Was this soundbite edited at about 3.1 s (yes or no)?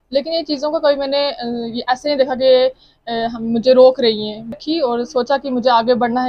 no